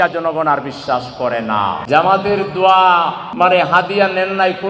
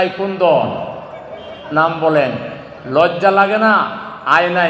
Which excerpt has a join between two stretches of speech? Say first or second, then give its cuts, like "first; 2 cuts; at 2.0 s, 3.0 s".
first; 2 cuts; at 1.8 s, 3.2 s